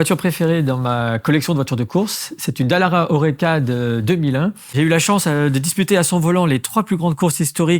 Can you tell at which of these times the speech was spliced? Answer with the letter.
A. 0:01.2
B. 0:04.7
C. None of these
B